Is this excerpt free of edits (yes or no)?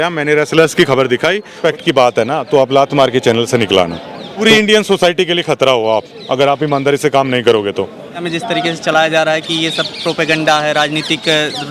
no